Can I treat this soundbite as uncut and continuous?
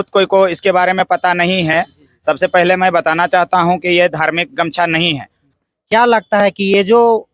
no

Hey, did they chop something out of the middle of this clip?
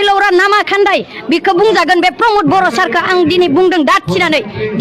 no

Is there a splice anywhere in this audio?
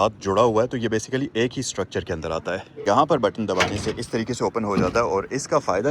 yes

